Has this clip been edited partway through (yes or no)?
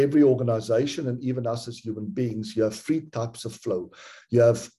no